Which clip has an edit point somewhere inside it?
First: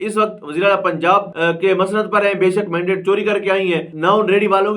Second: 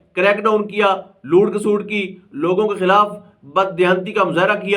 first; 2 cuts; at 1.3 s, 3.9 s

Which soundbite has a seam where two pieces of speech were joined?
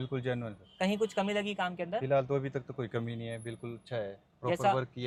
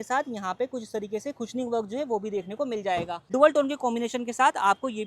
second; 1 cut; at 3.2 s

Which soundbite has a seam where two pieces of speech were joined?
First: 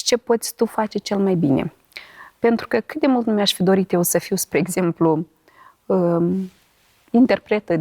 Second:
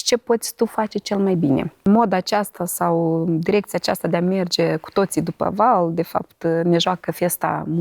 second; 1 cut; at 1.9 s

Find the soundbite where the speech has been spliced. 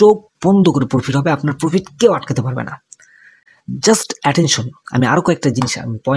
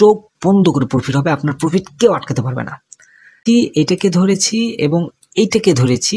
second; 1 cut; at 3.4 s

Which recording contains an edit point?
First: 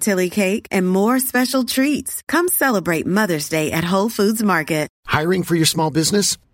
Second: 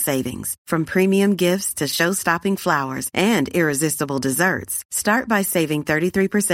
first; 1 cut; at 5.0 s

